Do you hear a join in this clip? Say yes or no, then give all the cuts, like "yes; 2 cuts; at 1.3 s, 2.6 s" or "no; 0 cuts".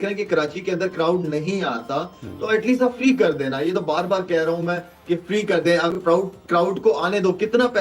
no; 0 cuts